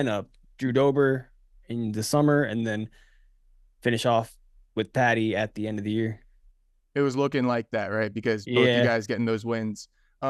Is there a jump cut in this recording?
no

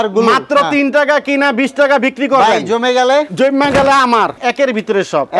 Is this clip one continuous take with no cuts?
no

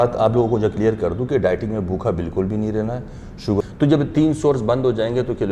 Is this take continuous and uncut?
no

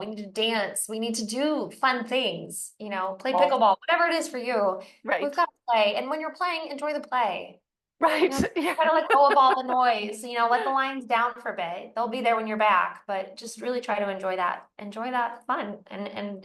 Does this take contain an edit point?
no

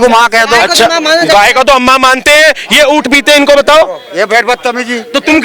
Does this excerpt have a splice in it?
yes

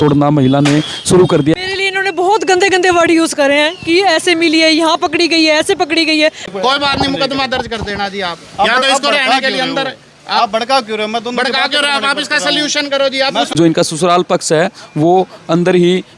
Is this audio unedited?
no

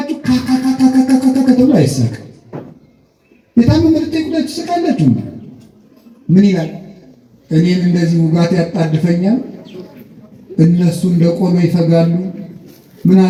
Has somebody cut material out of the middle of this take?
no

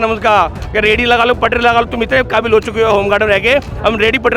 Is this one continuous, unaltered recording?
yes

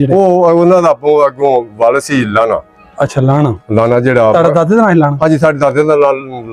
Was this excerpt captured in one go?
yes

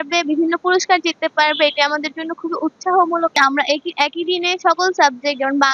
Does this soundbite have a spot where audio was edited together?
yes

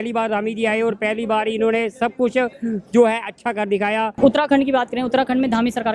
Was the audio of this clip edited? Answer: yes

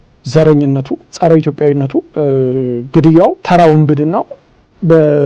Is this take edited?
yes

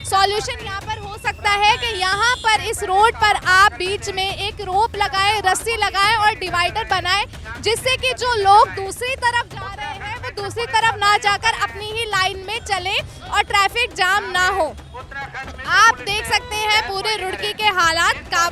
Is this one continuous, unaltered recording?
yes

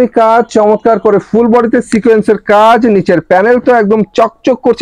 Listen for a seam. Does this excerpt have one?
no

